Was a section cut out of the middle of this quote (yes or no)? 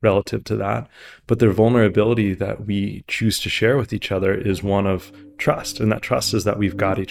no